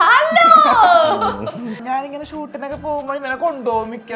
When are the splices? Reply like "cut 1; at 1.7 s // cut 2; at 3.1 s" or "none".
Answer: cut 1; at 1.8 s